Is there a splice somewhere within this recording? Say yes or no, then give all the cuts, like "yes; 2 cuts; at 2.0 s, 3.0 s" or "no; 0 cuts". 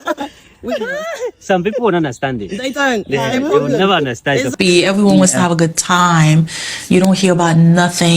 yes; 1 cut; at 4.5 s